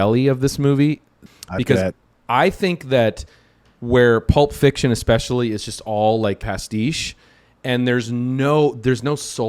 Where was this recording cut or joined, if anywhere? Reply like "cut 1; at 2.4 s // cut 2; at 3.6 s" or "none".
cut 1; at 1.2 s // cut 2; at 6.4 s